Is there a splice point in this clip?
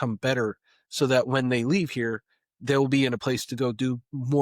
yes; 1 cut; at 3.2 s

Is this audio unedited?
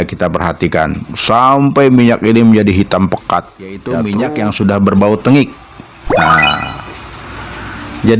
no; 1 cut; at 3.9 s

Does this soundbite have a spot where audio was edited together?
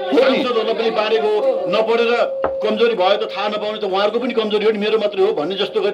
no; 0 cuts

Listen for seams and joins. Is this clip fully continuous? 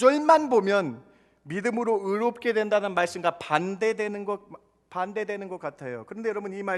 yes; 0 cuts

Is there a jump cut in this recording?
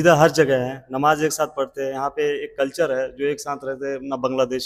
no; 0 cuts

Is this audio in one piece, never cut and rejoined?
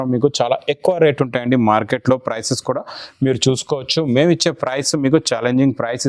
yes; 0 cuts

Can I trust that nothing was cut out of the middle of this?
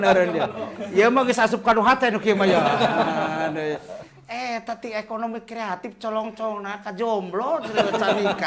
yes; 0 cuts

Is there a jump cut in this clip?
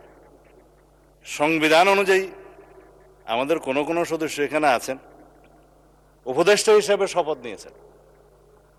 no; 0 cuts

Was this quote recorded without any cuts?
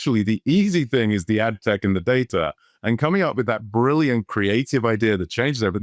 yes; 0 cuts

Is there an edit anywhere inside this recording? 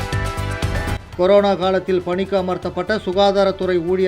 yes; 1 cut; at 1.0 s

